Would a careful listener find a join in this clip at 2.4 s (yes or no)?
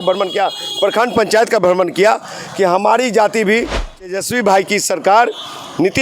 no